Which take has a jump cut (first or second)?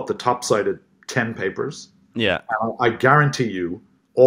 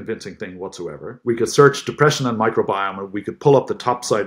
second